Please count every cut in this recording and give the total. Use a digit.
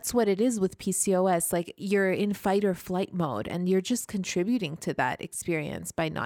1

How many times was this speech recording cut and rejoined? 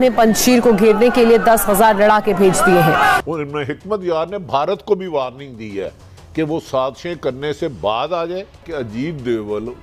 2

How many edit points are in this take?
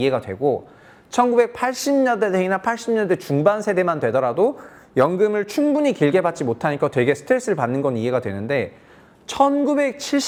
0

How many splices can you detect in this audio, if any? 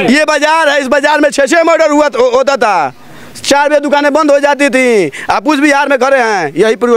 0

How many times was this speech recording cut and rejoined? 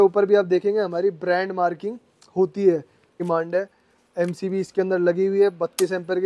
1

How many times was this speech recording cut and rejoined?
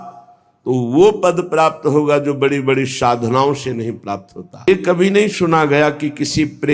1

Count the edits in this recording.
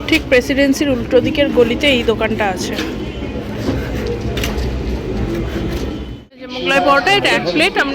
1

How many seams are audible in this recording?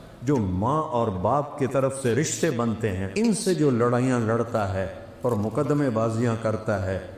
1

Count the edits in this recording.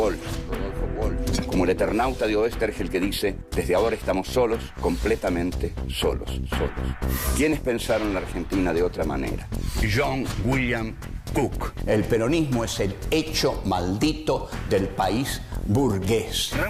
1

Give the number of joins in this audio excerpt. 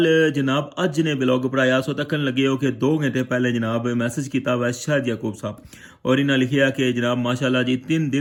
0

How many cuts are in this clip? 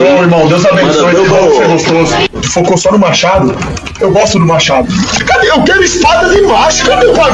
0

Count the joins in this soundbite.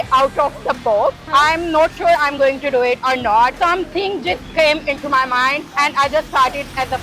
3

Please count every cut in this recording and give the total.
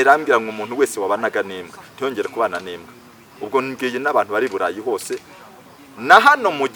0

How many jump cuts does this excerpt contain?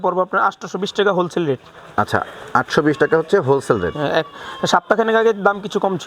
0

